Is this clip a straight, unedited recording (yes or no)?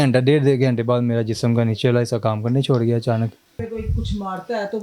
no